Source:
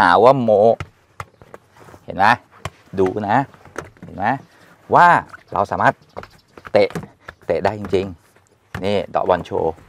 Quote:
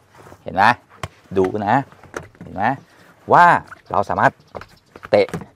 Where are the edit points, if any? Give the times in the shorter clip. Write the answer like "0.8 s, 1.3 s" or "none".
none